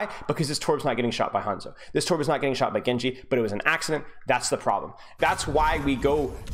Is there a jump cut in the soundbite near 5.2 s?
yes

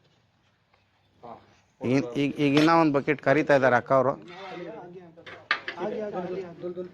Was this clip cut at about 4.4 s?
no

